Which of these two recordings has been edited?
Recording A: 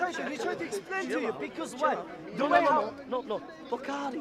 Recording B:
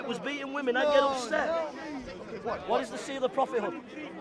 B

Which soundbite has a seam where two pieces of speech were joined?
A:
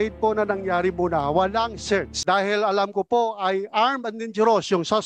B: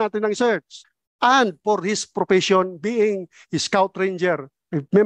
A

